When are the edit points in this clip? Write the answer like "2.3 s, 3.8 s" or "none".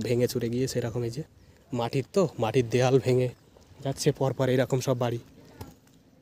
none